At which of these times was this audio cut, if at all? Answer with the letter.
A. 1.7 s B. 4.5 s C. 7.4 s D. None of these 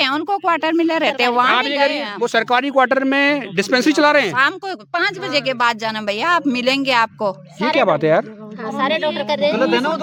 D